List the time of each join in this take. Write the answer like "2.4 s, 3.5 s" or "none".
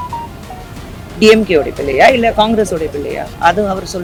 none